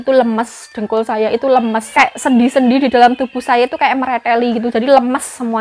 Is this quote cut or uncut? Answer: cut